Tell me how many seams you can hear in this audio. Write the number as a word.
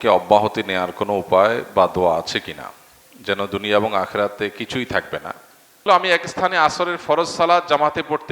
one